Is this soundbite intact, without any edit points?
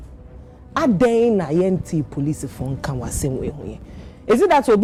yes; 0 cuts

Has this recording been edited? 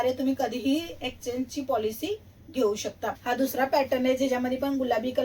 yes; 1 cut; at 3.2 s

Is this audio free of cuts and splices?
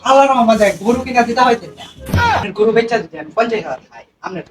no; 1 cut; at 2.5 s

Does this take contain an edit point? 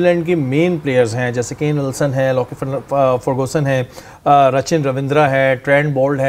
no; 0 cuts

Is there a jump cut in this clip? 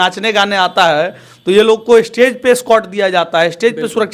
no; 0 cuts

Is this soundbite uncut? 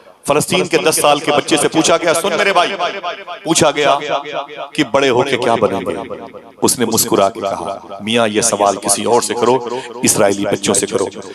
yes; 0 cuts

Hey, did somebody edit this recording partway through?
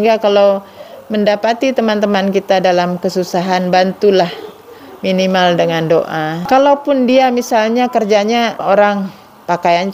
yes; 2 cuts; at 6.4 s, 8.6 s

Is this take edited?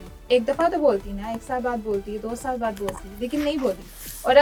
no; 0 cuts

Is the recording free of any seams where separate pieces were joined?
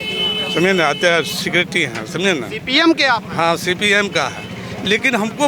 yes; 0 cuts

